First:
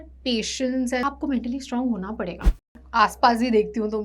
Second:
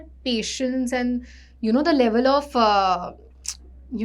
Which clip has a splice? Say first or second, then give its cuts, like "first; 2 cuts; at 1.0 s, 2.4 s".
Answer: first; 2 cuts; at 1.0 s, 2.6 s